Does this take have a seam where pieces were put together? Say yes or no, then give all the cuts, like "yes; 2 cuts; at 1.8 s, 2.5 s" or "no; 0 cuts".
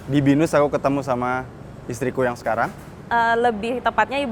yes; 1 cut; at 3.0 s